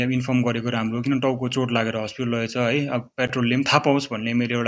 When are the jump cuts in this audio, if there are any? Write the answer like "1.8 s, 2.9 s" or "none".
none